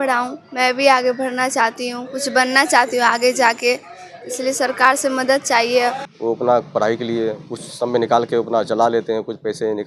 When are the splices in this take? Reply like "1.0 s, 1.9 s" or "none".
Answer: 6.1 s